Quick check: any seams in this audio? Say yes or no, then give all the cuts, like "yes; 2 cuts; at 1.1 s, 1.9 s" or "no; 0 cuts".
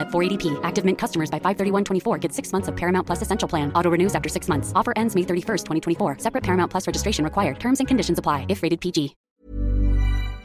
yes; 1 cut; at 9.2 s